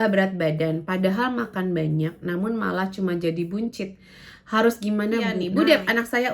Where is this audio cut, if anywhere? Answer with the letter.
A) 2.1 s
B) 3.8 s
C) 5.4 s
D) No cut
C